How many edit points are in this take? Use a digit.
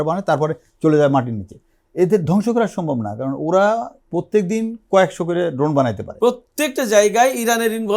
1